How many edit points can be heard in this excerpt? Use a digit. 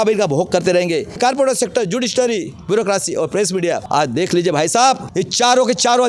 3